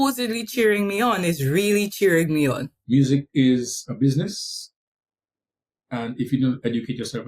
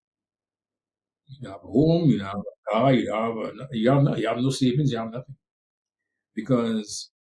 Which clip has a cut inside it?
first; 1 cut; at 2.7 s

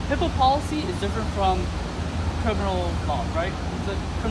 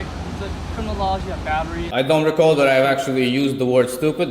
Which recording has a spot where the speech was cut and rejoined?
second; 1 cut; at 1.8 s

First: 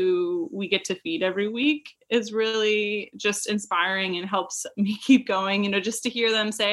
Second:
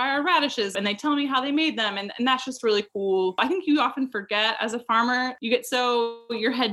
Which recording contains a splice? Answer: second; 3 cuts; at 0.7 s, 3.4 s, 5.4 s

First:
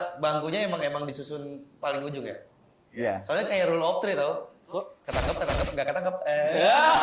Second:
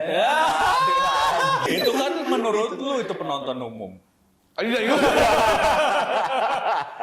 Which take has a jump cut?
second; 1 cut; at 1.7 s

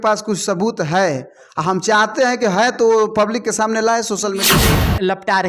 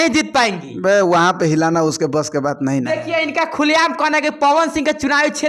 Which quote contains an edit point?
first; 1 cut; at 4.5 s

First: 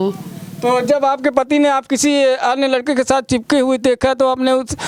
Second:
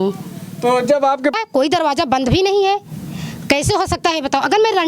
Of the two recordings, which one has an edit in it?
second; 1 cut; at 1.3 s

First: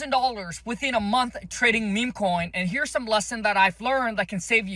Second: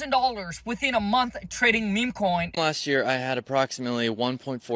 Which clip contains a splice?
second; 1 cut; at 2.5 s

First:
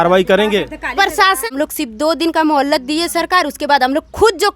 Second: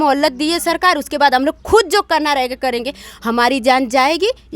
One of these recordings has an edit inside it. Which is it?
first; 1 cut; at 1.5 s

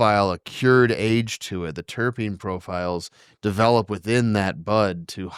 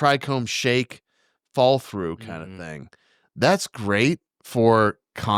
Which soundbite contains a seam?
second; 1 cut; at 4.3 s

